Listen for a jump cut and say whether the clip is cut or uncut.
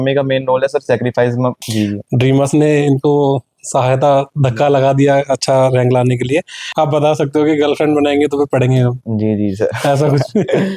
cut